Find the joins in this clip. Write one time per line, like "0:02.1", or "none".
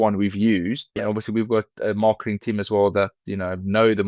0:01.0